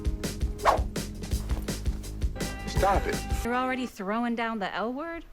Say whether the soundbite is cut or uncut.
cut